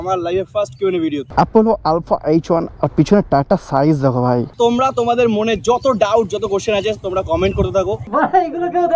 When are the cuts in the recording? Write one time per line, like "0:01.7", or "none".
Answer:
0:01.2
0:04.5
0:08.0